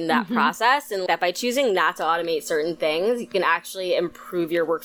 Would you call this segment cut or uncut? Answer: cut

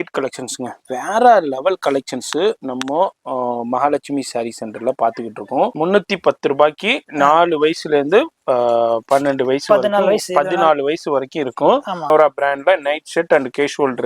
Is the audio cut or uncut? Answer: cut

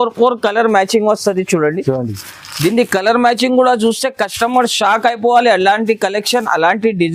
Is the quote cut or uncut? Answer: uncut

